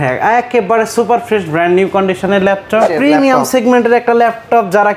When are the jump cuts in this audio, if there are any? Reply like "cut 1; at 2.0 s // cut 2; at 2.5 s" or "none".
cut 1; at 2.9 s

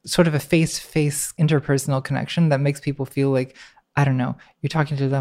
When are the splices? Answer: cut 1; at 1.3 s

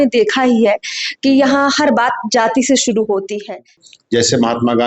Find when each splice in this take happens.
cut 1; at 3.9 s

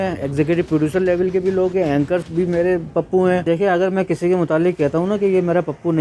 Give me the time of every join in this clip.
cut 1; at 2.3 s // cut 2; at 3.5 s

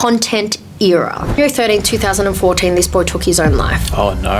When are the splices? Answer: cut 1; at 1.4 s

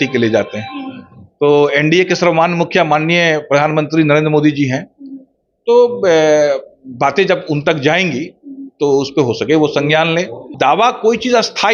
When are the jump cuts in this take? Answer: cut 1; at 10.5 s

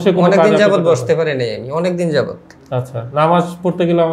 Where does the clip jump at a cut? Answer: none

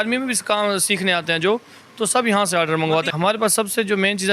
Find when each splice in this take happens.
cut 1; at 3.1 s

